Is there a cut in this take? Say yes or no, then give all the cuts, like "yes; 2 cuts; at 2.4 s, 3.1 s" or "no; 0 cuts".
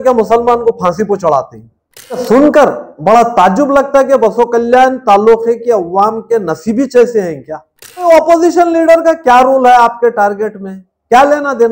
yes; 2 cuts; at 2.2 s, 8.0 s